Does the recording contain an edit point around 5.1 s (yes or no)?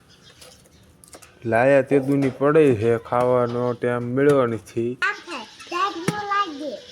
yes